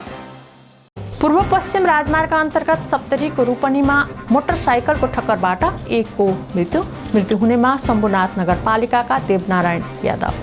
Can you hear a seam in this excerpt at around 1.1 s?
no; 0 cuts

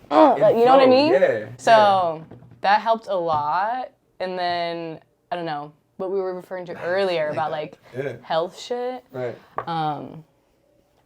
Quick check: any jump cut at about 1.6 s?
no; 0 cuts

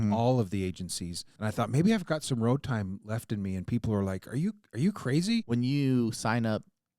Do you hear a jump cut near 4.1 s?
no; 2 cuts; at 1.4 s, 5.5 s

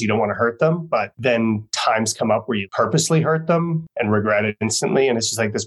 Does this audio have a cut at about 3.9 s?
yes; 3 cuts; at 1.1 s, 2.7 s, 3.9 s

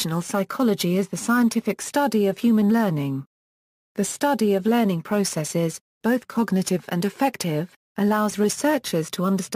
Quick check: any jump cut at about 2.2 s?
no; 1 cut; at 0.9 s

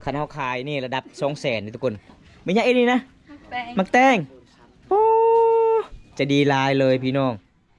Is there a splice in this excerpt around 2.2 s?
yes; 1 cut; at 2.2 s

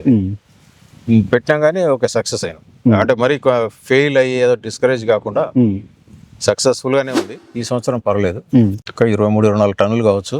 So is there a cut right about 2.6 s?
no; 1 cut; at 7.4 s

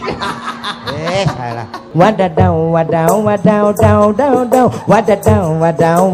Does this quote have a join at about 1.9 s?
yes; 1 cut; at 1.9 s

